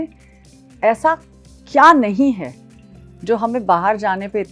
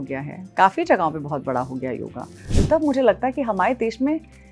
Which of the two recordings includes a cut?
second; 1 cut; at 2.6 s

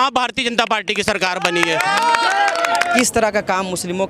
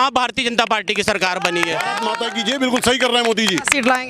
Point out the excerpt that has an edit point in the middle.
second; 1 cut; at 2.2 s

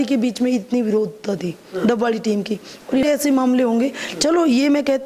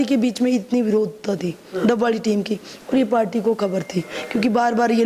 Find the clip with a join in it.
first; 1 cut; at 3.0 s

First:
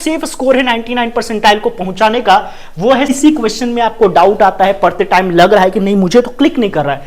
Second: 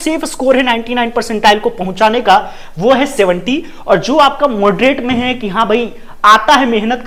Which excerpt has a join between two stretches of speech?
first; 1 cut; at 3.1 s

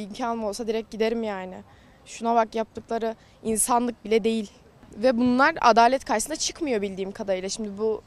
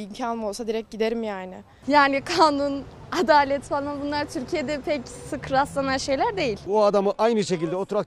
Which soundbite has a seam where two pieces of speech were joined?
second; 2 cuts; at 1.8 s, 6.6 s

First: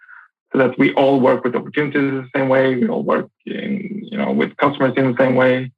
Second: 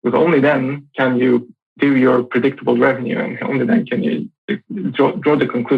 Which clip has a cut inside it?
second; 1 cut; at 1.6 s

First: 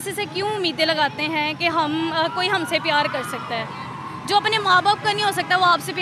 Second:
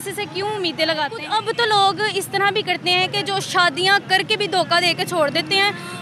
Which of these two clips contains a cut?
second; 1 cut; at 1.2 s

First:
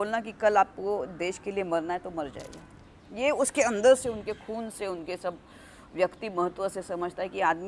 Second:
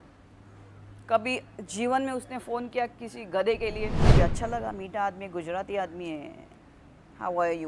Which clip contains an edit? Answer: second; 1 cut; at 4.1 s

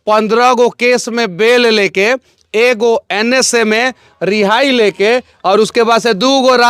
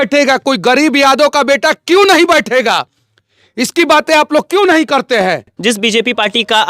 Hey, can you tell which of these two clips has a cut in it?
second; 1 cut; at 5.5 s

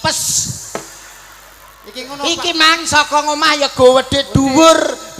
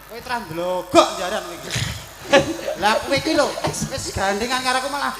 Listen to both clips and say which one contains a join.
second; 1 cut; at 2.3 s

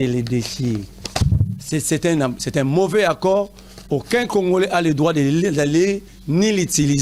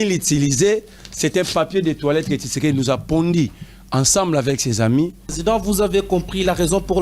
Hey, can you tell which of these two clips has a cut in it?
second; 1 cut; at 5.3 s

